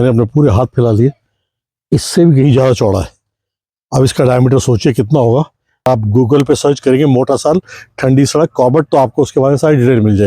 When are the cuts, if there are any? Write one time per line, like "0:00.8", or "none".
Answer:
0:05.9